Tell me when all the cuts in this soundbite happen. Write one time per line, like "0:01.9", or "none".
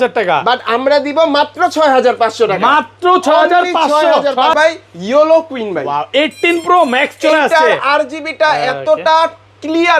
none